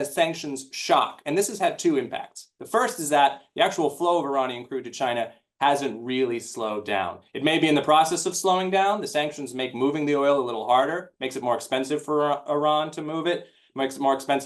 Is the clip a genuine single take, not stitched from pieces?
yes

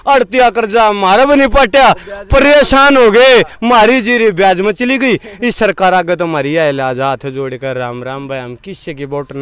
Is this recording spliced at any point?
no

